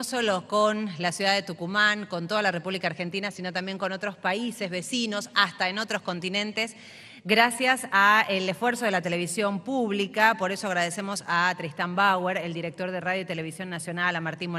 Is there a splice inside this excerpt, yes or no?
yes